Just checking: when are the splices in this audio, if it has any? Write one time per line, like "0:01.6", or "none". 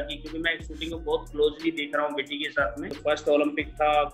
0:02.8

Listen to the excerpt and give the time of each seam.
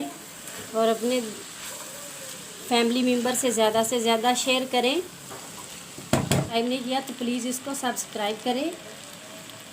0:06.5

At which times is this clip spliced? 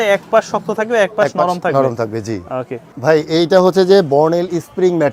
none

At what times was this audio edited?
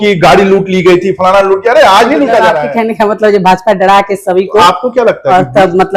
0:02.5

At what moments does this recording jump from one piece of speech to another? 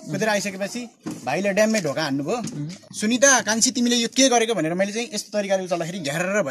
0:02.7

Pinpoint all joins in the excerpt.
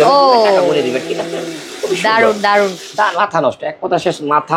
none

